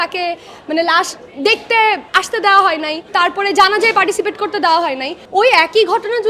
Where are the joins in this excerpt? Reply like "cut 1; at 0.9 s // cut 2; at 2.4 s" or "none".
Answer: cut 1; at 2.1 s // cut 2; at 3.0 s // cut 3; at 5.1 s